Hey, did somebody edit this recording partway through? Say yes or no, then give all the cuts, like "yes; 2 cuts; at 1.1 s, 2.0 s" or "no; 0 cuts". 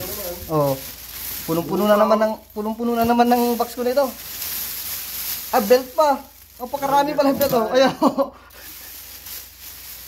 no; 0 cuts